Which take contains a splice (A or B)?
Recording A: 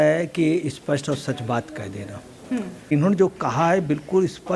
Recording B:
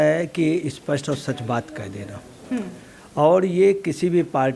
A